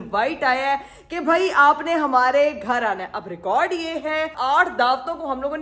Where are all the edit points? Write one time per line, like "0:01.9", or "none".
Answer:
0:04.3